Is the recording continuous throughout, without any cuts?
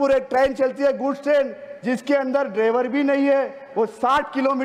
yes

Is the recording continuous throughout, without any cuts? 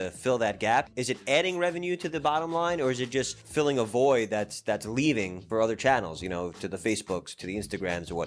no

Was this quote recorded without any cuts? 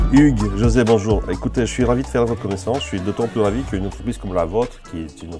yes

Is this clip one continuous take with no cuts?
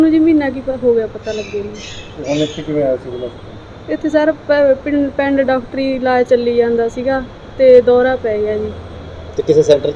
yes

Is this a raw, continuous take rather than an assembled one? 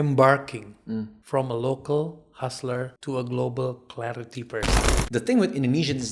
no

